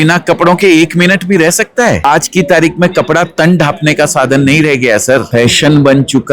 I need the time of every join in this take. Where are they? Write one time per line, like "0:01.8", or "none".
0:02.0
0:05.3